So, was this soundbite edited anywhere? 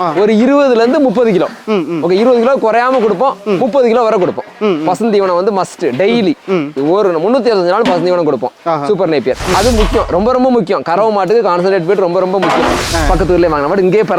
yes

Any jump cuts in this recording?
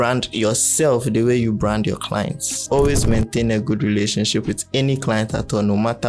yes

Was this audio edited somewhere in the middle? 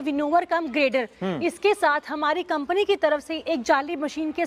no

